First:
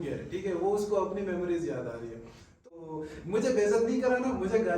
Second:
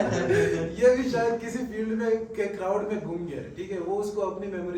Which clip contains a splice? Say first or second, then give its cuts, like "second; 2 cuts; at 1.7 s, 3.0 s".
first; 1 cut; at 2.7 s